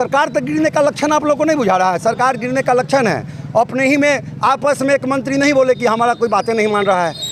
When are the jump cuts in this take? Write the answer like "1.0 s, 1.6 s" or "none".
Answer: none